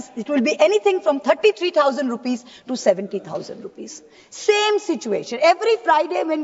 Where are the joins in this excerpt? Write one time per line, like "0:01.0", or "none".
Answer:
none